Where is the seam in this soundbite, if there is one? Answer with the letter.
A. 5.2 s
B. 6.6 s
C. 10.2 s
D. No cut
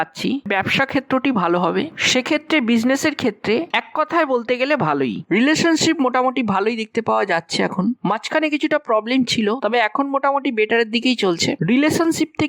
A